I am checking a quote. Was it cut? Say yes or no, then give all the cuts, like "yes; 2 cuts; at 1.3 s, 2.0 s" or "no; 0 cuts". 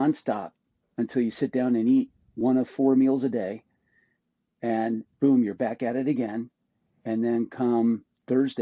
no; 0 cuts